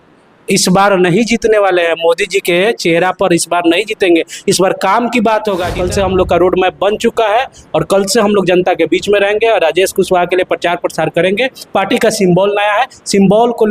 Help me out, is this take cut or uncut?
cut